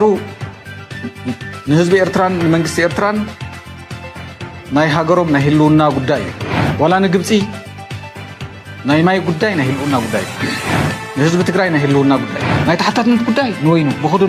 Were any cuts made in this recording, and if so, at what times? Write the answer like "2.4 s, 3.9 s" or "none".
none